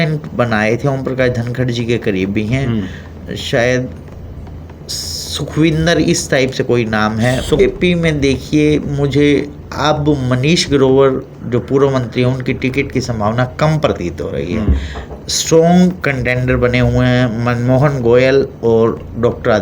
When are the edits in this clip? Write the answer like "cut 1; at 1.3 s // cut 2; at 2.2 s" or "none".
cut 1; at 7.6 s